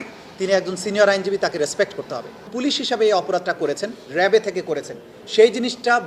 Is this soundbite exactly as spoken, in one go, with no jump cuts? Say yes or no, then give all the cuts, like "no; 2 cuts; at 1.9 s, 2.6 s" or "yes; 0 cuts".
no; 1 cut; at 2.5 s